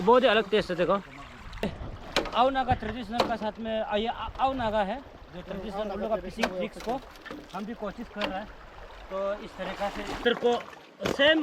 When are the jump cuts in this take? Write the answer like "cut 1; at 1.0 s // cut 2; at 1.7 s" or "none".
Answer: cut 1; at 1.8 s // cut 2; at 10.2 s